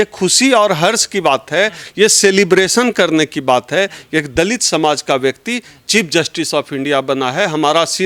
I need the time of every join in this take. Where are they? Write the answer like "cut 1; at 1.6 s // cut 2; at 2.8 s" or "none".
none